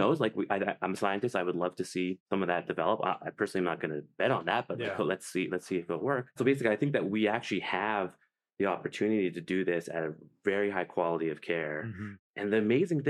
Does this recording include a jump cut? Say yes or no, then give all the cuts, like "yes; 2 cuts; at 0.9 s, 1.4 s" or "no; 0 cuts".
no; 0 cuts